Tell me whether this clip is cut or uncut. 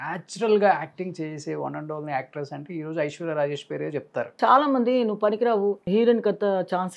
cut